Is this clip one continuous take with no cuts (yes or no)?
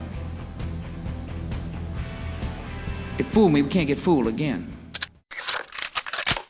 no